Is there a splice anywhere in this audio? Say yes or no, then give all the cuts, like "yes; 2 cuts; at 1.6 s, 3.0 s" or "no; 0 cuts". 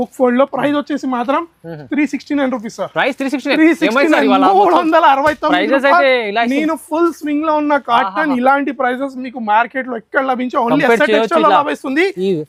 no; 0 cuts